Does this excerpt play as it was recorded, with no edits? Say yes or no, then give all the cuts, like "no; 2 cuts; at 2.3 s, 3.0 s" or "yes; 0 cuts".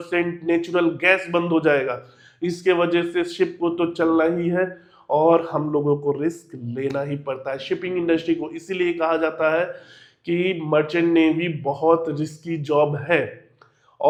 yes; 0 cuts